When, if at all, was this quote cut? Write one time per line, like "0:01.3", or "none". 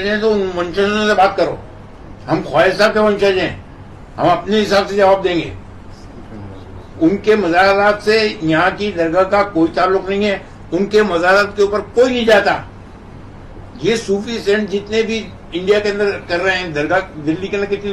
none